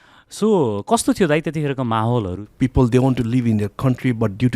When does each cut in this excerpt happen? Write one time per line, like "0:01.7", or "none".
0:02.4